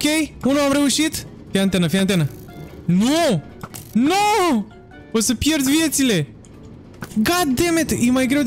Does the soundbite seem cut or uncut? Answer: uncut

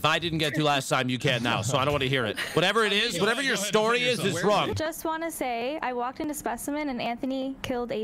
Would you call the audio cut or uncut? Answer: uncut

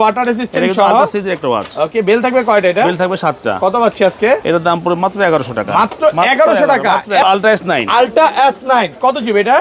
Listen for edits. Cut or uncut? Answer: cut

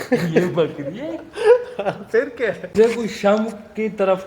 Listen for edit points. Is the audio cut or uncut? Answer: cut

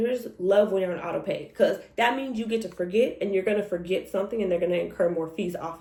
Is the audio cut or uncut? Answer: uncut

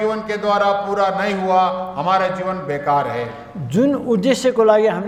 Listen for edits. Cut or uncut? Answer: uncut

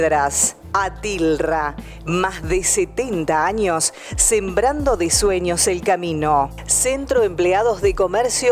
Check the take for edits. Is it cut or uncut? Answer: cut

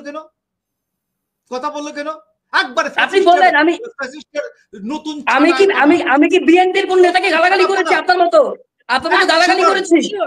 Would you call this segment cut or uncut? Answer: uncut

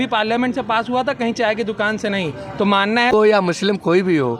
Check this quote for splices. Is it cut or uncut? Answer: cut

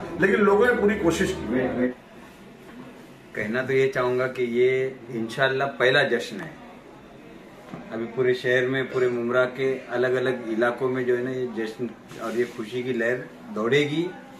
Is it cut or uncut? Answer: cut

